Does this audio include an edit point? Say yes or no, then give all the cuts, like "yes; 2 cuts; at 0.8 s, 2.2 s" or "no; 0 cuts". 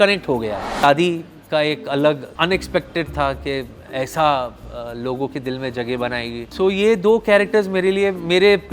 yes; 2 cuts; at 0.8 s, 2.3 s